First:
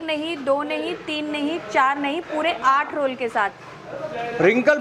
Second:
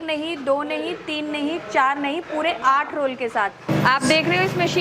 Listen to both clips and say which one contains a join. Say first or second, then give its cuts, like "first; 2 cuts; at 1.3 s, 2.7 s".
second; 1 cut; at 3.7 s